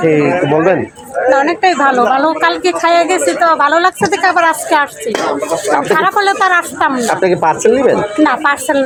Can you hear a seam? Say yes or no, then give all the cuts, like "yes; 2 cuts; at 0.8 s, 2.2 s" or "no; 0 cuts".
no; 0 cuts